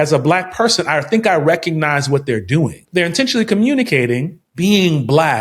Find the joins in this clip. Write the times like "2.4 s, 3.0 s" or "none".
2.8 s, 4.4 s